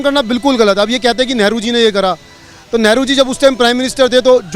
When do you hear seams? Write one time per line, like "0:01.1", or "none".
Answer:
none